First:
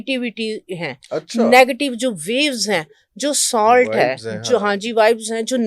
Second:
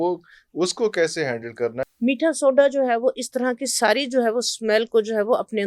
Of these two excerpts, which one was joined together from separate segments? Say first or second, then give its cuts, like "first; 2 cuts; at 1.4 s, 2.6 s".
second; 1 cut; at 1.8 s